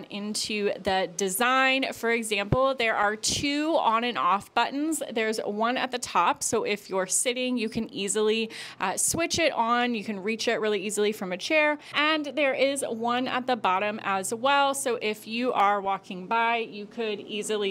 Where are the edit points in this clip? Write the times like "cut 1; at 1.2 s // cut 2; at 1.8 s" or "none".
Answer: cut 1; at 11.9 s